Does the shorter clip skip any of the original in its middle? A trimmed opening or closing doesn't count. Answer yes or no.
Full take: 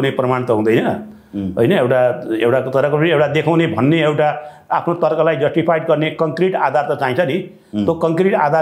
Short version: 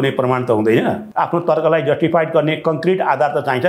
yes